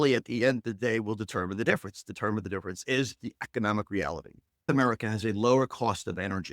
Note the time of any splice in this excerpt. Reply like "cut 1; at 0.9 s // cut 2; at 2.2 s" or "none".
cut 1; at 4.7 s